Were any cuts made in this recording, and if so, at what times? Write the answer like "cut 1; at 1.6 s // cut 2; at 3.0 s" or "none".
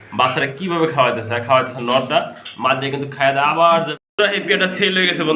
cut 1; at 3.9 s